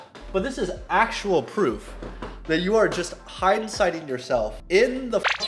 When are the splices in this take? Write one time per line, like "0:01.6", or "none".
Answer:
0:04.6